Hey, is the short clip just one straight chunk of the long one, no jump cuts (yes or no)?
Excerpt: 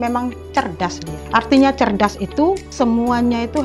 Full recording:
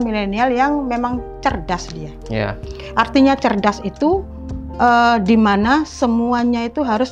no